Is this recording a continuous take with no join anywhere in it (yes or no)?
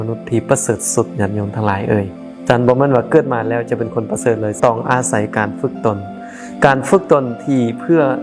no